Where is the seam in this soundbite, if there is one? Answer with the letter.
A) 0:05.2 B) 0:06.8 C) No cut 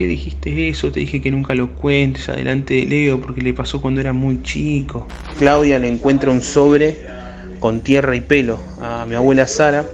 A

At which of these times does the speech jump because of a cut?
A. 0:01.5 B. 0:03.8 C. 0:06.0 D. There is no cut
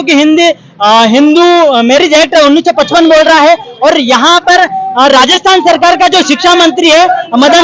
D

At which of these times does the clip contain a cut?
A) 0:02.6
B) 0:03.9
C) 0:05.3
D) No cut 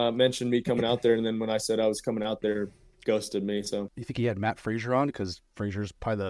B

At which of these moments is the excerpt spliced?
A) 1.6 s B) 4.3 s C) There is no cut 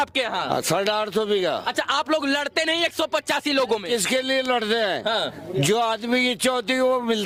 C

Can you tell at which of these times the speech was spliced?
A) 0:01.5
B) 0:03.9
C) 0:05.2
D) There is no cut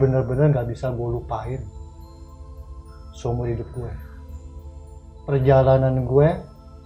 C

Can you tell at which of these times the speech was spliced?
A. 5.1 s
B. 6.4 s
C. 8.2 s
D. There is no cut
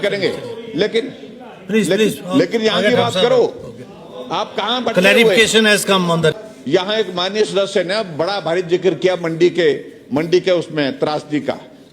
B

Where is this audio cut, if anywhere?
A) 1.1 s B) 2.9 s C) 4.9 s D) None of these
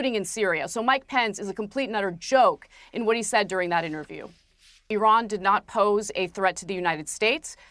C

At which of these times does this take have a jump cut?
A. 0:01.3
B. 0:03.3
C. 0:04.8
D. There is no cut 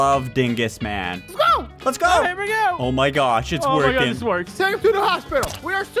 A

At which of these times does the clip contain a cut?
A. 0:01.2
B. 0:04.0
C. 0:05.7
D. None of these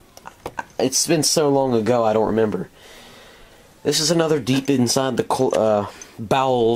C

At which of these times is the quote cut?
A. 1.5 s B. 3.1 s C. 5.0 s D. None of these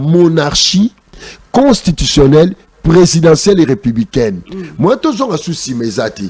D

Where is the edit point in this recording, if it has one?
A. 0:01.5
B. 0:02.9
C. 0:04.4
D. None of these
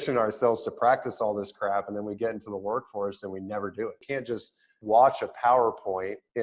C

